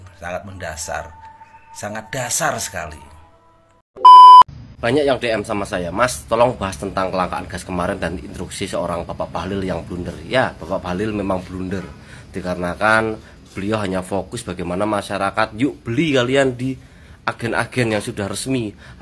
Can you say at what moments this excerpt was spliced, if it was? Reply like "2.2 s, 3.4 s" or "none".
3.9 s, 4.6 s